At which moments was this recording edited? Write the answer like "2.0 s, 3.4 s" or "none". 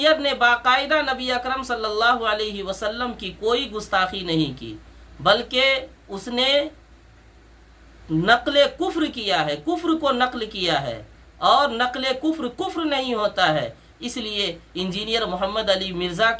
none